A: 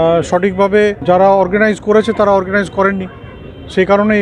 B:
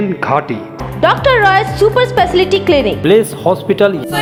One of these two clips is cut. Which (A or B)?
A